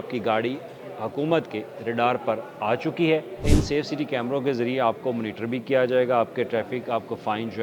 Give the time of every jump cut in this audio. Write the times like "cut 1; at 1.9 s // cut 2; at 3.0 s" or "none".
cut 1; at 3.5 s